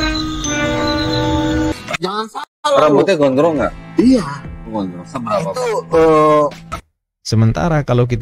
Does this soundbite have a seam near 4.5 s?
no; 2 cuts; at 1.8 s, 6.7 s

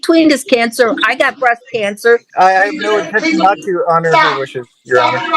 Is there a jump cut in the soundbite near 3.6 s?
no; 1 cut; at 2.3 s

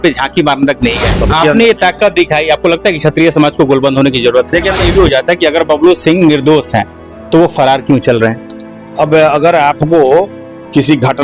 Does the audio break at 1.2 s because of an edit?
yes; 2 cuts; at 1.2 s, 4.8 s

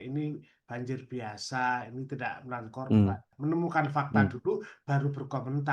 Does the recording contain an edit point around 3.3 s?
yes; 1 cut; at 3.3 s

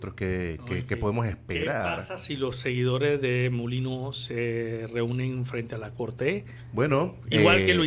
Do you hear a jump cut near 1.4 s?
no; 1 cut; at 6.6 s

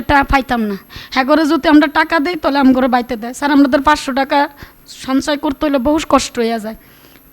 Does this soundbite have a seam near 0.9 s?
yes; 1 cut; at 0.9 s

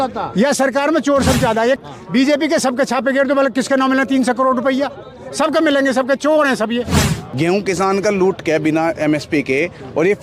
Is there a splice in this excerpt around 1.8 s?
yes; 2 cuts; at 1.8 s, 7.2 s

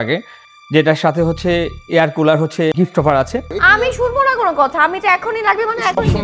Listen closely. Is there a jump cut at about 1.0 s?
no; 2 cuts; at 2.7 s, 3.5 s

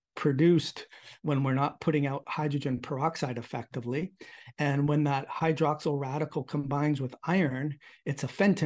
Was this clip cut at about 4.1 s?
no; 0 cuts

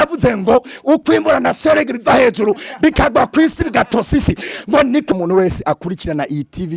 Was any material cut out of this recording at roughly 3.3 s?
no; 1 cut; at 5.1 s

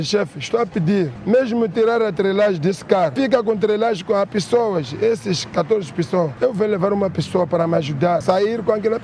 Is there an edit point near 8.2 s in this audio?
yes; 4 cuts; at 1.2 s, 3.1 s, 6.3 s, 8.2 s

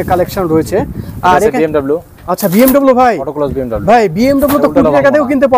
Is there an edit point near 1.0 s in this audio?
no; 0 cuts

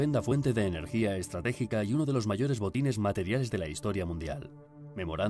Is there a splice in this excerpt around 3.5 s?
yes; 1 cut; at 3.5 s

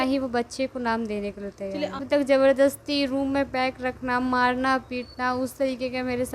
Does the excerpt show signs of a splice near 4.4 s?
no; 1 cut; at 2.0 s

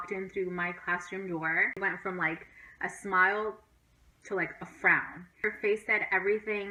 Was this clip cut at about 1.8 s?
no; 0 cuts

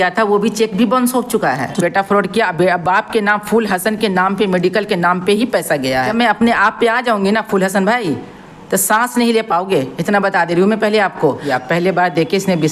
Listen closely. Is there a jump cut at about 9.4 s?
no; 3 cuts; at 1.7 s, 6.1 s, 11.4 s

